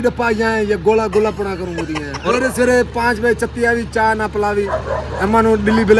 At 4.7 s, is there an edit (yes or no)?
yes